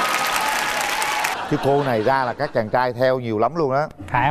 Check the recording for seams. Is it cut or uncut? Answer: cut